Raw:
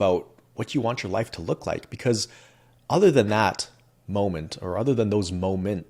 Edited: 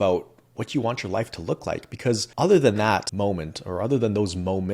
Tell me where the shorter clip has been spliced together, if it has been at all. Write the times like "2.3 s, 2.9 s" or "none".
2.3 s, 3.1 s

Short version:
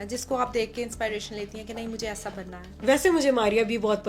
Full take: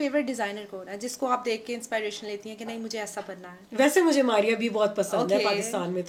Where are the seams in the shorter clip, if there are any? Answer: none

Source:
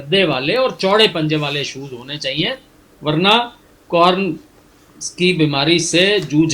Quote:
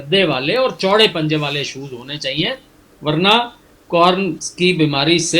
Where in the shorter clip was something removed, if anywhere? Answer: 4.4 s

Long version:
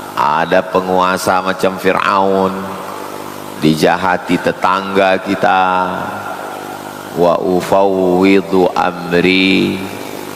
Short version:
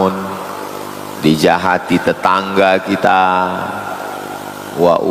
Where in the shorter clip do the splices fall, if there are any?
none

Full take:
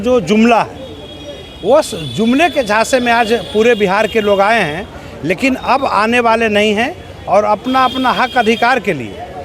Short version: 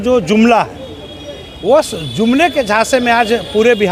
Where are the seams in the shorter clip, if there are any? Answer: none

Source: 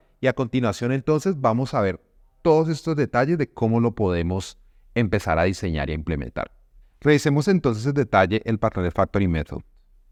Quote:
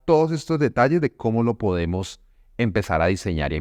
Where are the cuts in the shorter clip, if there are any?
none

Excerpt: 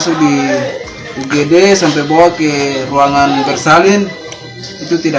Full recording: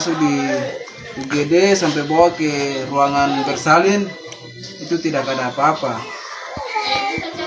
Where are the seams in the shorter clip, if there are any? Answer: none

